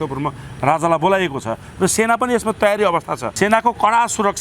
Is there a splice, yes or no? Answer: yes